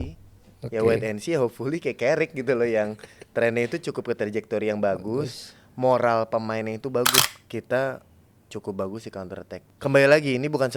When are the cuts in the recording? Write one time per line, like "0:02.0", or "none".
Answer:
0:07.3
0:09.5